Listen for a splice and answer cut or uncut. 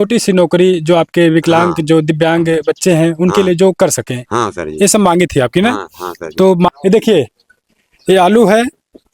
cut